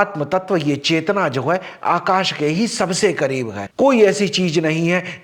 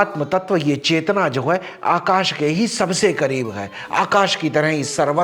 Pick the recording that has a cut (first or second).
first